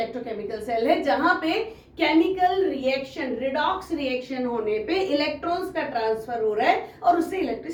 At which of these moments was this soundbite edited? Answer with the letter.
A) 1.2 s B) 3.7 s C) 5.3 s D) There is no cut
D